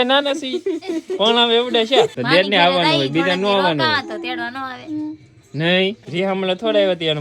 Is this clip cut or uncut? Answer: cut